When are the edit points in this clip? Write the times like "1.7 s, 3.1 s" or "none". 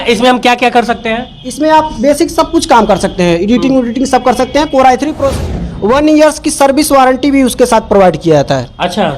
5.4 s